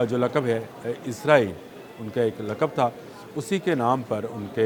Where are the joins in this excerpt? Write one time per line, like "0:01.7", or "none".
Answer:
none